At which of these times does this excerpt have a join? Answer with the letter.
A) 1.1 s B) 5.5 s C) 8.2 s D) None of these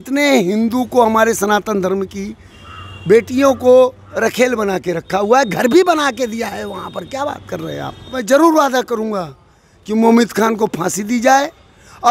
C